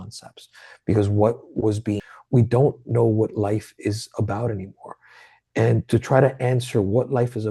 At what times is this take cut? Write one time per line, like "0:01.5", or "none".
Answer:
0:02.1